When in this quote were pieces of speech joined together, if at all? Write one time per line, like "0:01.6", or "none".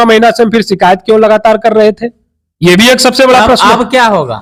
none